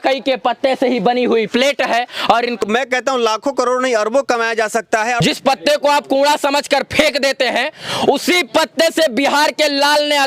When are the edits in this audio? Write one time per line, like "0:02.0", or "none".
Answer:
0:02.6
0:05.2